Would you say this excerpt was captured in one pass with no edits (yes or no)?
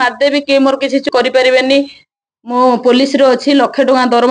no